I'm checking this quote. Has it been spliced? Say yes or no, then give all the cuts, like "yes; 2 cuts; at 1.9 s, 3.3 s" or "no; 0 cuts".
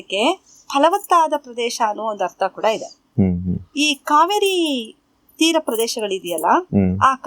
no; 0 cuts